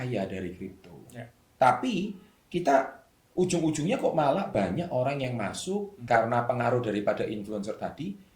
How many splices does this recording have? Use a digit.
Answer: 1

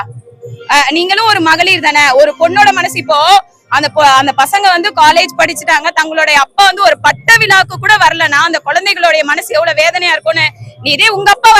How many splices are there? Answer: 0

